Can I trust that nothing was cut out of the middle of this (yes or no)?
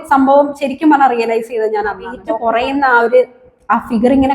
no